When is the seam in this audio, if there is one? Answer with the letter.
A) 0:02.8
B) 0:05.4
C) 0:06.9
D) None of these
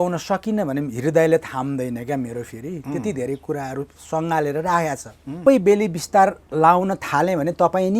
B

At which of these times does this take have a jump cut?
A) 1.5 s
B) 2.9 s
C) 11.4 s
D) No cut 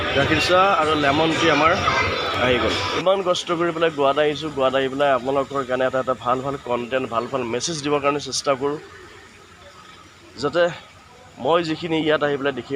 B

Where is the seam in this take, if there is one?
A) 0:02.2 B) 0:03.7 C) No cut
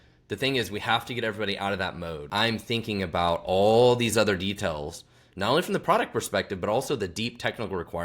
A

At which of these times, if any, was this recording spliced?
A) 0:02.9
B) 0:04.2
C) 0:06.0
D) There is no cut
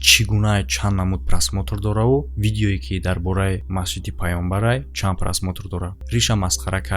C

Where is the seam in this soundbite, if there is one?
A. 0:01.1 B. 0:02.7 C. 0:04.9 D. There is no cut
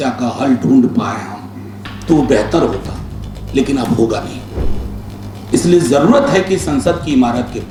D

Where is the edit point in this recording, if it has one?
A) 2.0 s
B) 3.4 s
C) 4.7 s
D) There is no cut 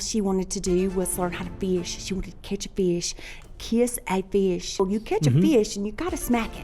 C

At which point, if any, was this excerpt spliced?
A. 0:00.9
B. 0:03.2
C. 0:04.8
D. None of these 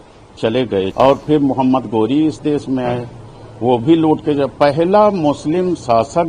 A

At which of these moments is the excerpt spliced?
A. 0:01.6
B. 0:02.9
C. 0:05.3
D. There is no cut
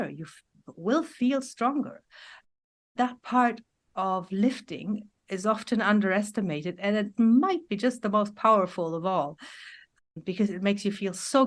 B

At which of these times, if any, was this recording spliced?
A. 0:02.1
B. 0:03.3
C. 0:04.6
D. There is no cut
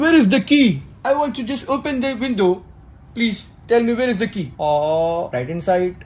D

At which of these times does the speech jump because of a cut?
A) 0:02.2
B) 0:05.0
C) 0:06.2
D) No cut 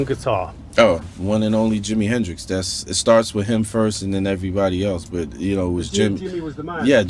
D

